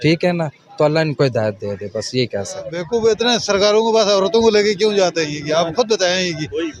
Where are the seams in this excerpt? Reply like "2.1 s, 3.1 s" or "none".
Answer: 2.8 s